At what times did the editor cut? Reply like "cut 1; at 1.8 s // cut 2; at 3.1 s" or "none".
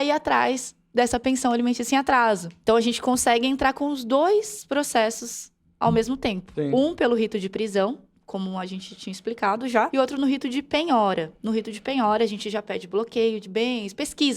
cut 1; at 2.5 s // cut 2; at 6.4 s // cut 3; at 9.9 s